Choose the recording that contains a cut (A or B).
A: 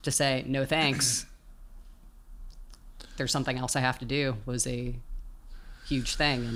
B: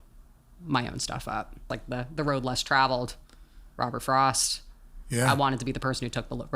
B